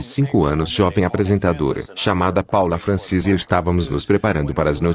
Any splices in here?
no; 0 cuts

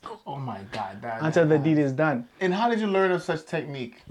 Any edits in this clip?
yes; 1 cut; at 2.4 s

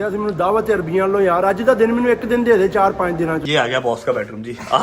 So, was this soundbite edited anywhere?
yes; 1 cut; at 3.4 s

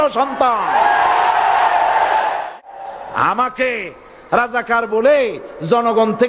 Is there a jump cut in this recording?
yes; 1 cut; at 2.5 s

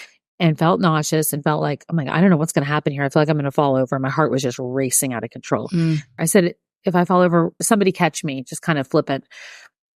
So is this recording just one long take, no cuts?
no; 2 cuts; at 6.2 s, 7.6 s

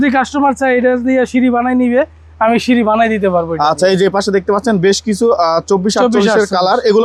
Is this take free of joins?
yes; 0 cuts

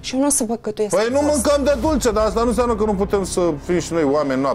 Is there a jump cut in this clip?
no; 0 cuts

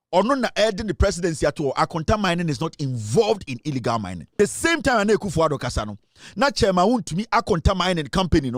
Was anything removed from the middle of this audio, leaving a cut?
yes; 1 cut; at 4.2 s

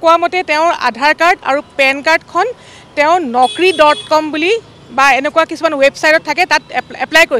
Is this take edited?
no; 0 cuts

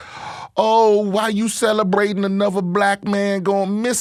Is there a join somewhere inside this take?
no; 0 cuts

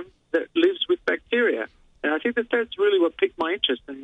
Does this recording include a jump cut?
no; 0 cuts

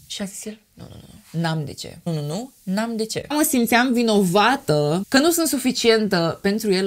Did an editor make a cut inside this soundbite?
no; 0 cuts

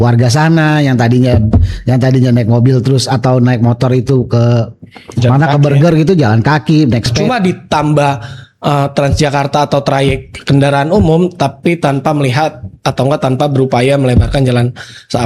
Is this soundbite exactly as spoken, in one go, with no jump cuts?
no; 1 cut; at 7.1 s

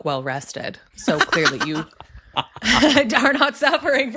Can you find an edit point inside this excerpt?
no; 0 cuts

